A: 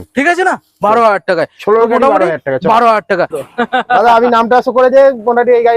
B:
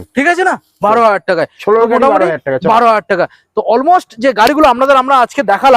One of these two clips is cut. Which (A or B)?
A